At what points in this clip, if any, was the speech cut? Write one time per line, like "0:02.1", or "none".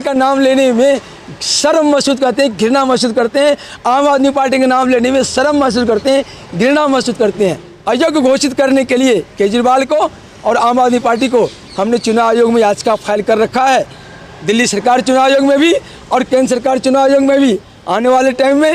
0:07.7